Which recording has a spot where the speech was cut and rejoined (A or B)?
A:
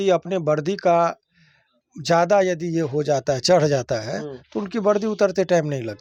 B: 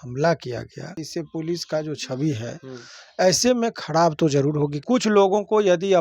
B